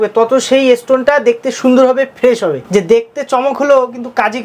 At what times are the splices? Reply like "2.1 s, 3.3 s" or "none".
2.6 s